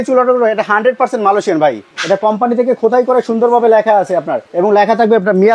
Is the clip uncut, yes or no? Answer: no